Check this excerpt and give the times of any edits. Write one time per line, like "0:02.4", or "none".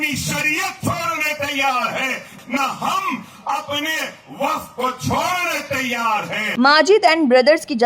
0:02.3
0:06.5